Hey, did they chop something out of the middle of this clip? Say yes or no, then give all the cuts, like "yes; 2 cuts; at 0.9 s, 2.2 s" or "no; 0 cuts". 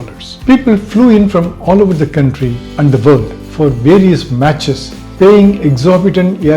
no; 0 cuts